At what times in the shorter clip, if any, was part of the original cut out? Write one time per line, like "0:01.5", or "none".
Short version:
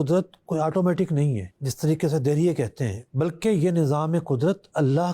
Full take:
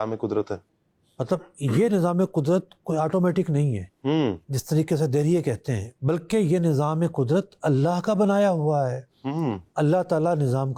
0:01.5